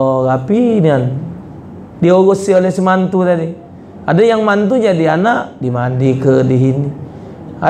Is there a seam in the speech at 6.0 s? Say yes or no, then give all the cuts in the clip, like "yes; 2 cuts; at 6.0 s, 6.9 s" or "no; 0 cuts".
no; 0 cuts